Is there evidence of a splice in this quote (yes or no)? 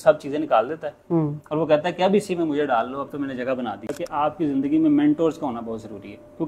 yes